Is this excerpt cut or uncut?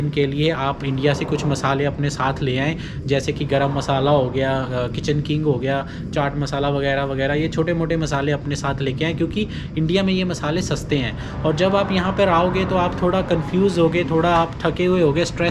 uncut